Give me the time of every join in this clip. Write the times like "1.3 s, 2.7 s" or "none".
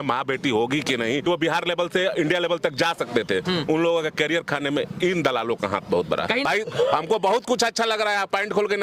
1.3 s, 6.4 s